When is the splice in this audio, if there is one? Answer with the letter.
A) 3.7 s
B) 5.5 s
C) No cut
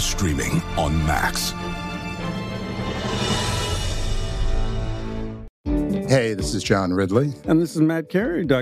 B